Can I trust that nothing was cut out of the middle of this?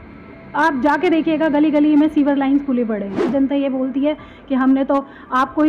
no; 1 cut; at 3.3 s

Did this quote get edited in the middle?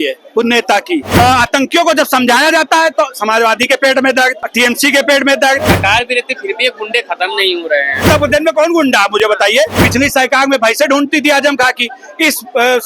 yes; 5 cuts; at 1.1 s, 4.4 s, 5.8 s, 8.0 s, 9.8 s

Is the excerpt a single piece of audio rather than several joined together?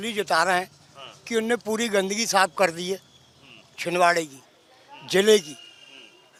yes; 0 cuts

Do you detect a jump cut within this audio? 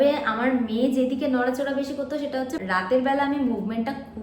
yes; 1 cut; at 2.6 s

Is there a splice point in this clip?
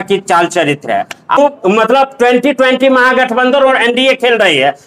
yes; 1 cut; at 1.4 s

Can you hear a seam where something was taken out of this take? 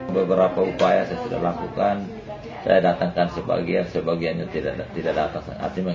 no; 0 cuts

